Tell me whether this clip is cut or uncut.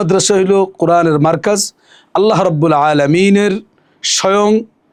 uncut